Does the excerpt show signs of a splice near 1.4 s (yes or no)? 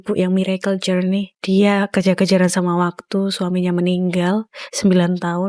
yes